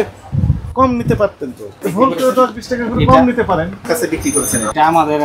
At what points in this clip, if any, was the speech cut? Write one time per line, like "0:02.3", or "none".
0:01.7
0:03.8